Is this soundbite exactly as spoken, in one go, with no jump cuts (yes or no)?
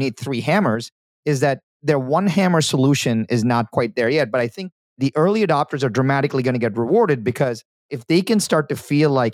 no